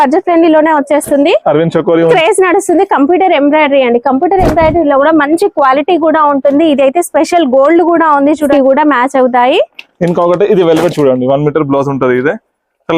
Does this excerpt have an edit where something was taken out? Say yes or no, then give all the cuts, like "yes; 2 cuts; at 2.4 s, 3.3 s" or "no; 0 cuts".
yes; 2 cuts; at 2.1 s, 8.5 s